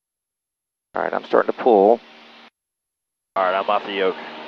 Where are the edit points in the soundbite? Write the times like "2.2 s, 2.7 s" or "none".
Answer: none